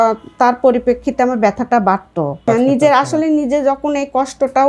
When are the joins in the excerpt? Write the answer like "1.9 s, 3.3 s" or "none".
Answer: 2.5 s